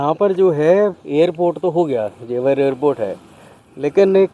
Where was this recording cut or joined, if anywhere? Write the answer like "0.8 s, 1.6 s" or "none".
1.0 s